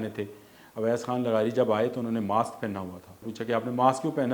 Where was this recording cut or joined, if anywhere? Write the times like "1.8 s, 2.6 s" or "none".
3.3 s